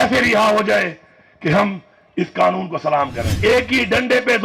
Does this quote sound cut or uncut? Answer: cut